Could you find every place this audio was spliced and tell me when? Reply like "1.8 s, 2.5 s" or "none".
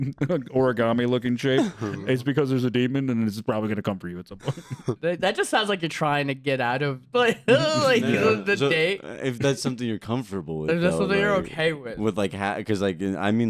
5.0 s